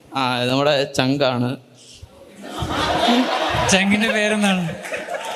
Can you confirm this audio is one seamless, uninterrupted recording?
yes; 0 cuts

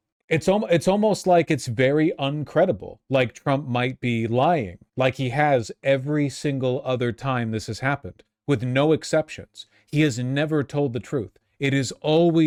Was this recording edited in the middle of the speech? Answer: no; 0 cuts

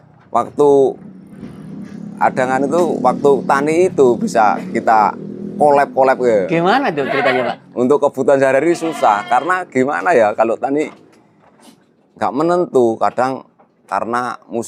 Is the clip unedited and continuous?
yes; 0 cuts

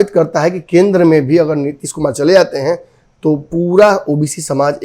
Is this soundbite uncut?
yes; 0 cuts

